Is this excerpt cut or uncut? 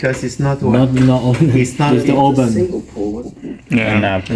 cut